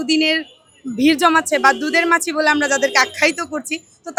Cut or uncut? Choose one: uncut